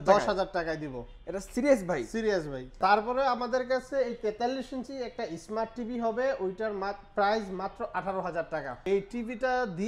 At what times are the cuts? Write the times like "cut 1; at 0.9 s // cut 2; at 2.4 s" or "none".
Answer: cut 1; at 2.7 s // cut 2; at 8.8 s